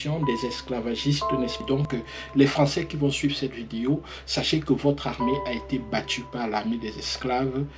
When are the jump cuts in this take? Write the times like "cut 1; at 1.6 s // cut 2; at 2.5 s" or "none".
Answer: cut 1; at 1.8 s